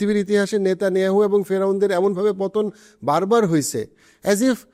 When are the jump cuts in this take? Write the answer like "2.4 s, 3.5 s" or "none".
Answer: none